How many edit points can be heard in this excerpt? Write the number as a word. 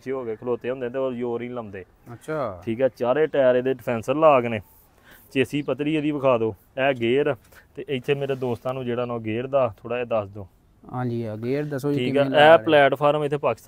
zero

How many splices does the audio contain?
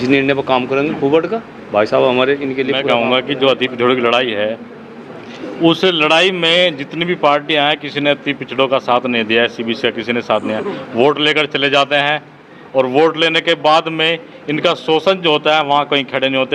one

